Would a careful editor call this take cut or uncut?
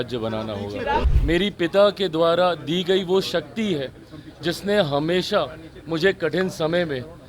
cut